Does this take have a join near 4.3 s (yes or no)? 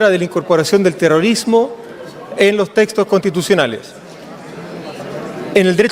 no